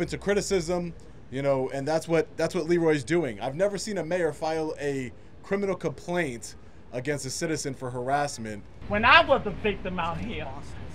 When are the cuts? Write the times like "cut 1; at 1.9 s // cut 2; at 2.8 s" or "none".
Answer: cut 1; at 8.7 s

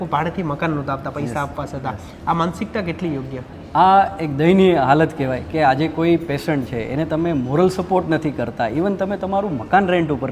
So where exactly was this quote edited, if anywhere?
none

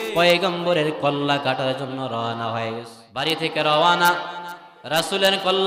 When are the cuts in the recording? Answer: cut 1; at 3.0 s

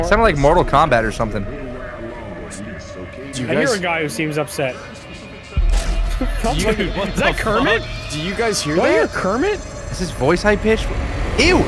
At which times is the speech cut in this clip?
none

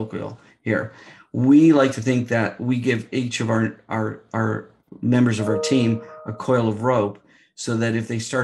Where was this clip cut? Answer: none

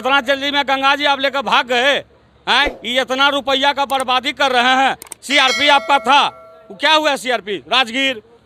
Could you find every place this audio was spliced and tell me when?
none

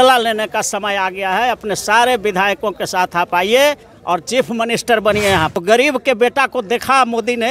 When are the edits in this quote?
cut 1; at 5.5 s

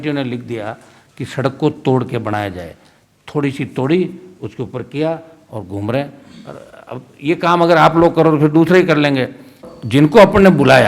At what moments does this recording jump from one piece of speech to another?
cut 1; at 9.7 s

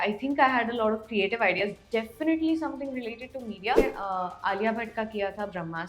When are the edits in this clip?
cut 1; at 3.9 s

